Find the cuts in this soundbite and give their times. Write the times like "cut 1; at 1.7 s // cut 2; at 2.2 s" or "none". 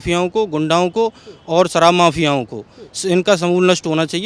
none